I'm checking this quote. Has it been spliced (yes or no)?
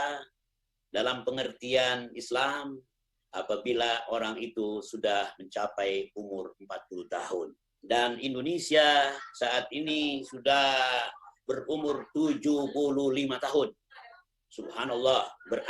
no